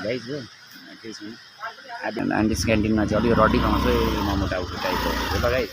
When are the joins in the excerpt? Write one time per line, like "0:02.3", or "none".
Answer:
0:02.2